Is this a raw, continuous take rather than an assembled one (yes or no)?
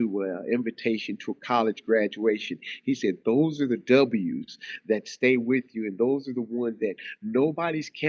yes